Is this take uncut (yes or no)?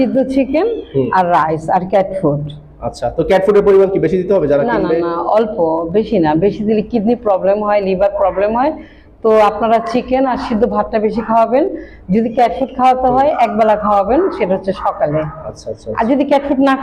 yes